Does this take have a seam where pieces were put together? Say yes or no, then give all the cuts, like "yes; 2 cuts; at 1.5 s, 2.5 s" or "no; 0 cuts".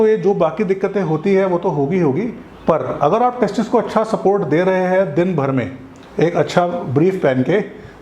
no; 0 cuts